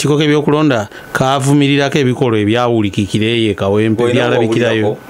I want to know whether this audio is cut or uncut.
uncut